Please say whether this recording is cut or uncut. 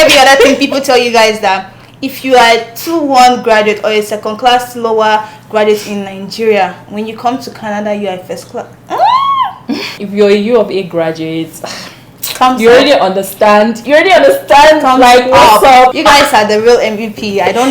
cut